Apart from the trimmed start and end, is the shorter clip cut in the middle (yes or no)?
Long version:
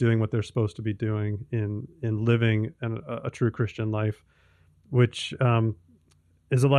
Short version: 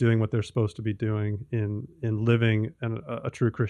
no